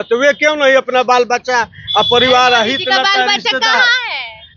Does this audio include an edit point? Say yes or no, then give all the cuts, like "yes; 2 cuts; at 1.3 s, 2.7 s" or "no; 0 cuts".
no; 0 cuts